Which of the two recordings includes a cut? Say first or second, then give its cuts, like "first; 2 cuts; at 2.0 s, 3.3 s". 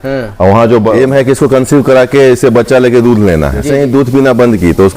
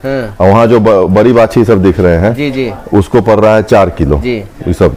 first; 2 cuts; at 0.9 s, 3.7 s